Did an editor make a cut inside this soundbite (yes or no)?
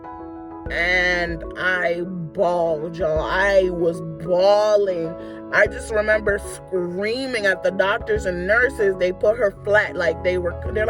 no